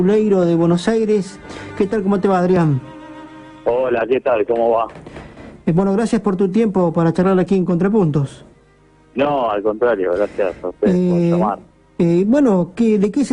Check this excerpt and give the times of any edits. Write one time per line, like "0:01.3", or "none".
0:11.3